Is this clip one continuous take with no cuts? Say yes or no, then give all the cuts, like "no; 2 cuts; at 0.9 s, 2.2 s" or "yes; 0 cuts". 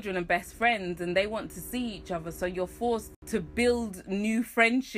yes; 0 cuts